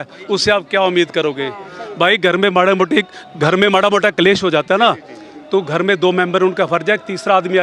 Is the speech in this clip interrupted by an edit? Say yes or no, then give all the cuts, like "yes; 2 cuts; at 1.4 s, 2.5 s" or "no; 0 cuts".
no; 0 cuts